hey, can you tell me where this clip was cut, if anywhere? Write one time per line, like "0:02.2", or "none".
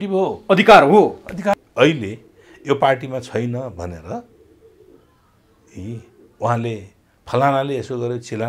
0:01.5

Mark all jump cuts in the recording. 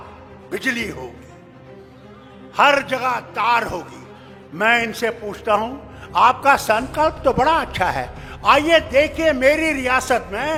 none

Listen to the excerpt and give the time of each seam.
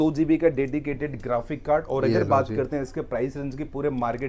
none

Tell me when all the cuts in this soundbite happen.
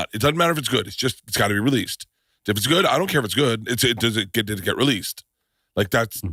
none

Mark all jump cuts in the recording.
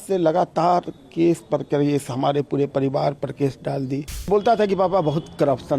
0:04.3

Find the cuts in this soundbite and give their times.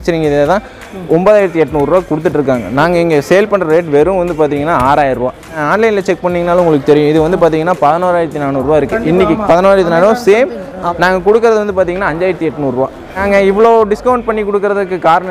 0:05.6
0:10.8
0:13.2

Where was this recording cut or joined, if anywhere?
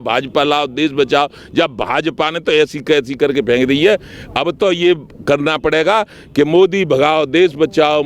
none

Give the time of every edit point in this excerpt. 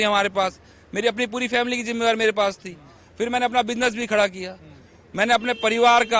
none

